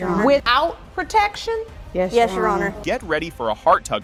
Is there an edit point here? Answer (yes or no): no